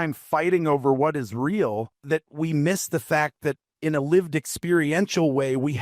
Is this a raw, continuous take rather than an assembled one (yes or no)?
no